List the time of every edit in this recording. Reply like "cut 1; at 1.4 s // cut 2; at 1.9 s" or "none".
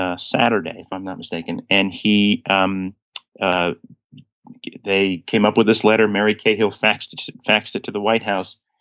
none